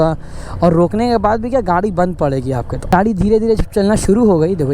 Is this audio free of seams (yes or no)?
no